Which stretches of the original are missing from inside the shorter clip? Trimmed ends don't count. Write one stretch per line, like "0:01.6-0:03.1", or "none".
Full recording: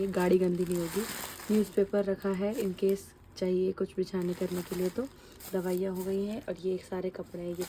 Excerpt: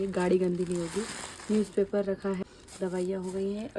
0:02.4-0:05.1